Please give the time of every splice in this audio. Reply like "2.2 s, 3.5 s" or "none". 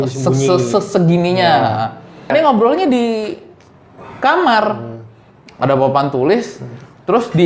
2.3 s